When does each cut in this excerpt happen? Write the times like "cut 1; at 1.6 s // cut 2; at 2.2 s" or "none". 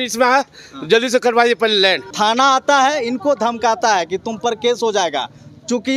cut 1; at 2.1 s